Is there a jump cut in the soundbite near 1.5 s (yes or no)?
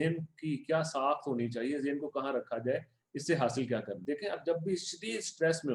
no